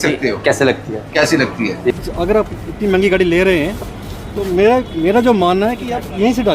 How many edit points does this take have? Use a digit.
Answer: 1